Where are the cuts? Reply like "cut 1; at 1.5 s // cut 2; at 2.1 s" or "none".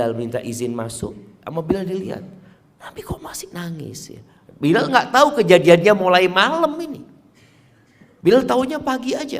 cut 1; at 1.3 s